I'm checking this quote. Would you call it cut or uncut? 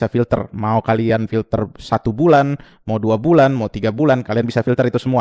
uncut